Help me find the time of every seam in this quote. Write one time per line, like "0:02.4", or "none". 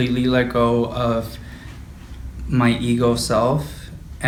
none